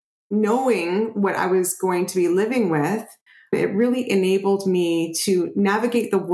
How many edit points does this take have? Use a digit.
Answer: 1